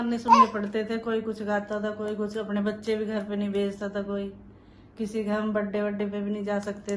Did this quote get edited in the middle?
no; 0 cuts

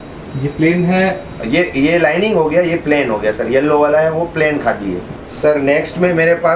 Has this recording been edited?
yes; 1 cut; at 5.1 s

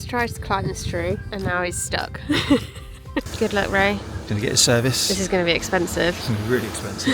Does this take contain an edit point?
yes; 2 cuts; at 1.2 s, 3.3 s

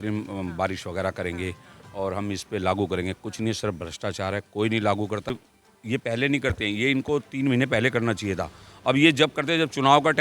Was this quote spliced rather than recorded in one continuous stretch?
yes; 1 cut; at 5.3 s

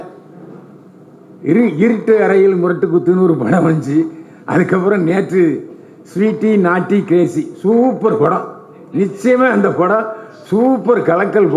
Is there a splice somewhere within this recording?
no; 0 cuts

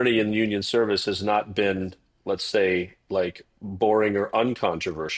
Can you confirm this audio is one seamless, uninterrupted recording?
yes; 0 cuts

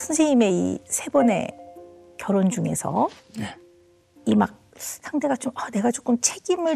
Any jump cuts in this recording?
no; 0 cuts

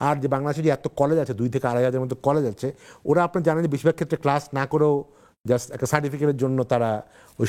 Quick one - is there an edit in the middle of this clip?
no; 0 cuts

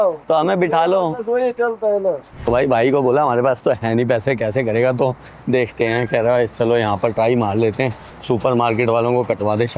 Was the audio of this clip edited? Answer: no; 0 cuts

